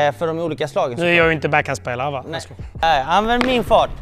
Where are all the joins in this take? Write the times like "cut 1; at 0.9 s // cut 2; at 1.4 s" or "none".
cut 1; at 2.8 s

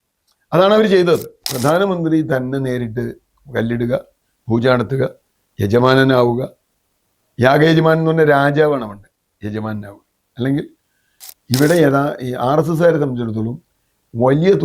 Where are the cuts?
cut 1; at 1.4 s

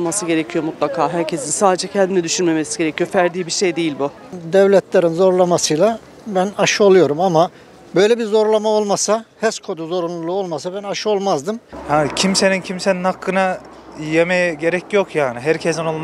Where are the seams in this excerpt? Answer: cut 1; at 4.3 s // cut 2; at 11.7 s

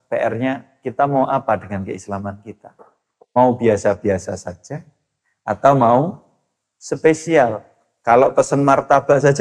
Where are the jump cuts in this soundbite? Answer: none

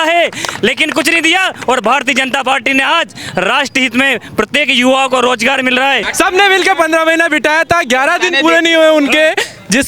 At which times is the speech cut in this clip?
cut 1; at 6.1 s

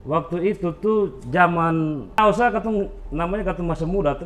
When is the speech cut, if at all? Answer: cut 1; at 2.2 s

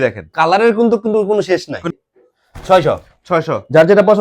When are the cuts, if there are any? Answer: cut 1; at 2.0 s

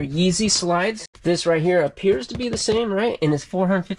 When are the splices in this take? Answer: cut 1; at 1.1 s

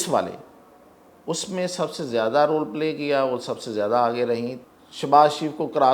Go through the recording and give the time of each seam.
cut 1; at 4.6 s

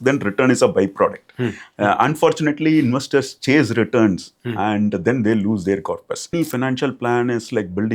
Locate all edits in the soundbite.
cut 1; at 6.3 s

